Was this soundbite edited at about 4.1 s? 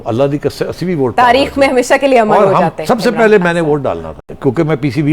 yes; 1 cut; at 4.1 s

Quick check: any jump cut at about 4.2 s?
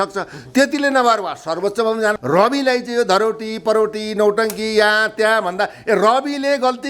no; 1 cut; at 2.2 s

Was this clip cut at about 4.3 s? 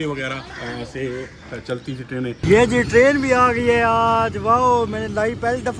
no; 1 cut; at 2.4 s

